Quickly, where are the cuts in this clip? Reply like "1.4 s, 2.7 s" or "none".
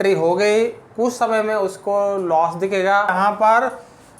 3.1 s